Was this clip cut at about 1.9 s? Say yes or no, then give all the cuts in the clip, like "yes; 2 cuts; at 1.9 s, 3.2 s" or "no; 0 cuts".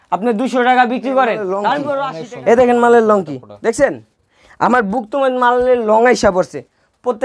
yes; 1 cut; at 1.9 s